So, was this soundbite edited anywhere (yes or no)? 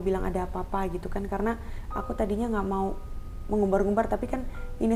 no